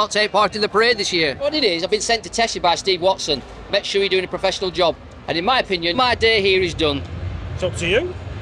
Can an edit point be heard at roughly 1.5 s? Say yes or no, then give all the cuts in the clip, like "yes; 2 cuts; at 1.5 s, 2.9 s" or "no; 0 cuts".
yes; 2 cuts; at 1.5 s, 5.9 s